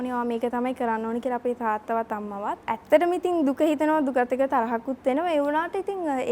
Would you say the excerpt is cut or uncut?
cut